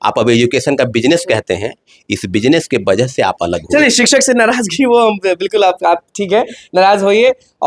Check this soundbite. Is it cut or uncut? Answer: uncut